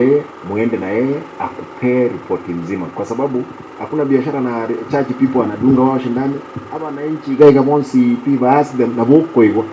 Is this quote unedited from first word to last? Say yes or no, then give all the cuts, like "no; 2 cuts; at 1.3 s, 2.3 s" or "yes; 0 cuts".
yes; 0 cuts